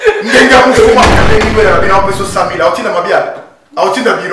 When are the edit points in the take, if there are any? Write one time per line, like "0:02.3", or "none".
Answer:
0:01.2